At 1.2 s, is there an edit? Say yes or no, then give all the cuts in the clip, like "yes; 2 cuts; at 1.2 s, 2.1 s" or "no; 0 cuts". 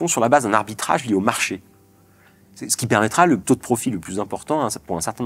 no; 1 cut; at 3.4 s